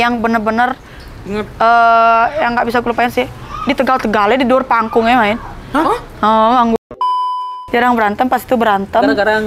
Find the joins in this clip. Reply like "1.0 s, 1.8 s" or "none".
7.3 s